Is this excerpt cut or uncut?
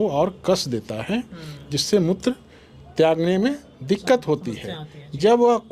uncut